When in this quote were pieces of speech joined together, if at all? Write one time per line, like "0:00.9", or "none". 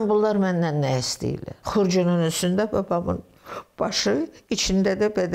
0:01.5